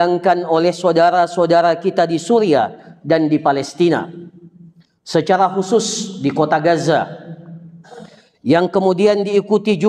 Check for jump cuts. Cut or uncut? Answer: uncut